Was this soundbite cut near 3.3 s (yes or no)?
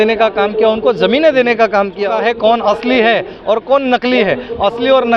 no